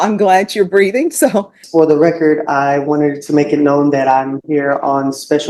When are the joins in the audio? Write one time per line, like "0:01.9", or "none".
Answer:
0:01.6